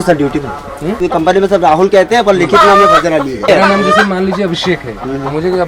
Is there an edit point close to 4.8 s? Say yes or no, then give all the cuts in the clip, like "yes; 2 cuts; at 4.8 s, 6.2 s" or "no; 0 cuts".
no; 2 cuts; at 1.1 s, 3.5 s